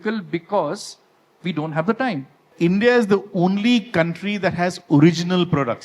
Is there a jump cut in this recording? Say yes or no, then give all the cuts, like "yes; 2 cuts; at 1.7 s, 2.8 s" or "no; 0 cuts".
yes; 1 cut; at 2.5 s